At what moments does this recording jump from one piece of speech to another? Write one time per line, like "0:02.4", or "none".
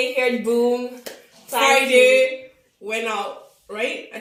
none